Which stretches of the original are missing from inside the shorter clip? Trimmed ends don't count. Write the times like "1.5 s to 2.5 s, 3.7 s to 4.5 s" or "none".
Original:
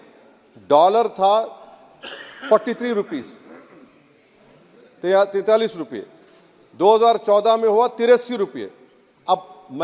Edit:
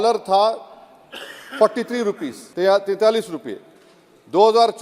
3.3 s to 4.8 s

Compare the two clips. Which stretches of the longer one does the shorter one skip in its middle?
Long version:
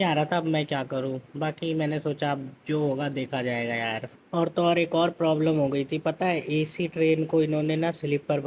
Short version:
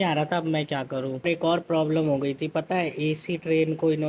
1.2 s to 4.8 s

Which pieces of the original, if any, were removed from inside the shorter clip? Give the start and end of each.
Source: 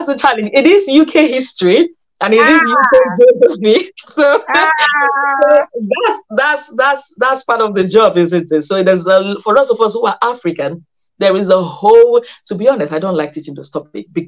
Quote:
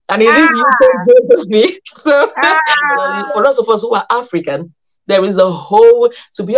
5.3 s to 9.3 s

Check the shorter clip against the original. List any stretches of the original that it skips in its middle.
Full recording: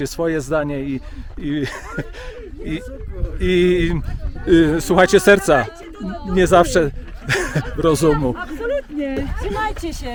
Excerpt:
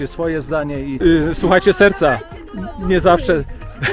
0.9 s to 4.4 s

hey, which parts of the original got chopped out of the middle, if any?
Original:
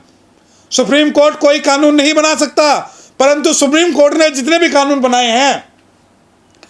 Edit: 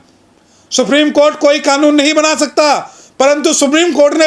none

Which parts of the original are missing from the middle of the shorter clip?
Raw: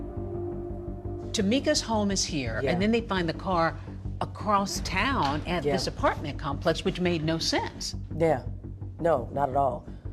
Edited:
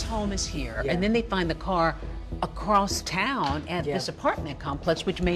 none

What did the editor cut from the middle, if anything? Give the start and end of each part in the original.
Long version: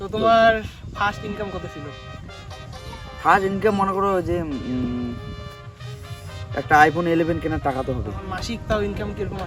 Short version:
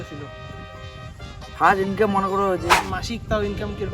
4.4 s to 8.2 s

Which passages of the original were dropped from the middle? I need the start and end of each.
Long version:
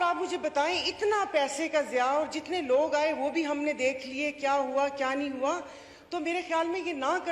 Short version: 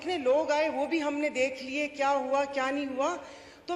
none

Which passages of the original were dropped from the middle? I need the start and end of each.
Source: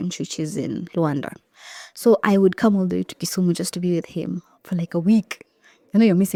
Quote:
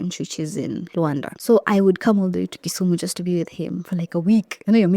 1.3 s to 1.9 s, 4.6 s to 5.3 s

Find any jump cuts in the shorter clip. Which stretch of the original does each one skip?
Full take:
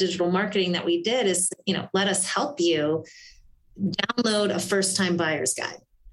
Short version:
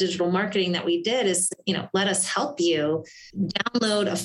3.2 s to 3.6 s

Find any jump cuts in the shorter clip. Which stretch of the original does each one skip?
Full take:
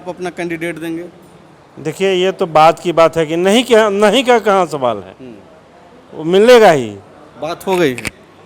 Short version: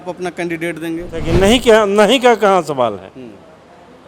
1.2 s to 3.2 s

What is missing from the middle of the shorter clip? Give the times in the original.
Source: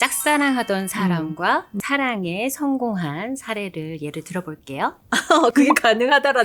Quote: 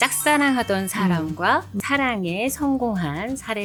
none

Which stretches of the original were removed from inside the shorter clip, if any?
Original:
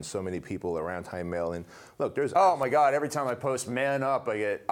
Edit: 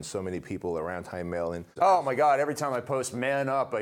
1.8 s to 2.3 s

